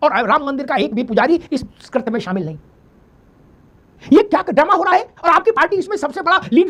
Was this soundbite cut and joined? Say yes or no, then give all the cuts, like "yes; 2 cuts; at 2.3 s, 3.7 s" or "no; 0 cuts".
no; 0 cuts